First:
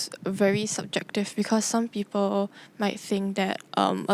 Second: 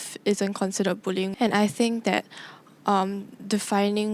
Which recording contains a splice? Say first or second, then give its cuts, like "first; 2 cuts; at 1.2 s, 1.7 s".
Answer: second; 1 cut; at 1.3 s